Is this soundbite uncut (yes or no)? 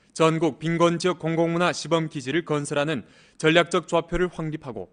no